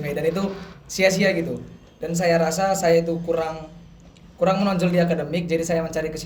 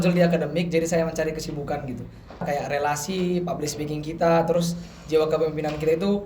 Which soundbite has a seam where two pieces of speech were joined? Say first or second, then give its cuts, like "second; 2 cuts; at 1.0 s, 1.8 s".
second; 1 cut; at 2.4 s